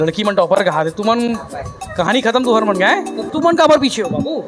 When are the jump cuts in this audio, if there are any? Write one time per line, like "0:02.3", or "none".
0:03.2